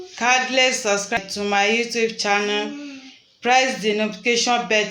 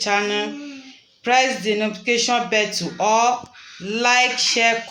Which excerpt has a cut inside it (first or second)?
first